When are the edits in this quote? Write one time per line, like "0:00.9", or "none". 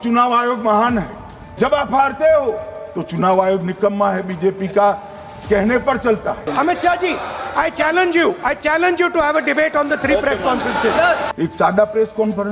0:06.5
0:11.3